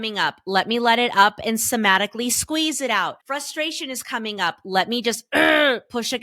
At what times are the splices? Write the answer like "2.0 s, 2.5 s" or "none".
3.2 s

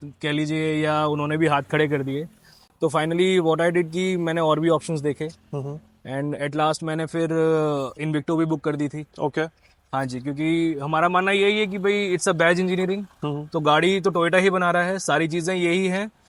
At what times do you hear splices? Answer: none

